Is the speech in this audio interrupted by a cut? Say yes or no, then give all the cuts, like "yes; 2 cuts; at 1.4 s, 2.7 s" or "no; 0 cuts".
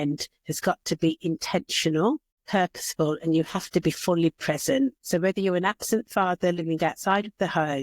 yes; 2 cuts; at 2.3 s, 5.0 s